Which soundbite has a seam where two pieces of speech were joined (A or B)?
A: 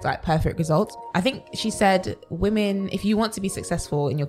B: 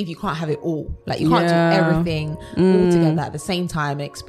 A